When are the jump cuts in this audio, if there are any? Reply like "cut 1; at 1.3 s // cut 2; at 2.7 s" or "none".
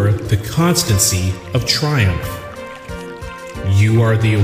cut 1; at 2.2 s // cut 2; at 3.4 s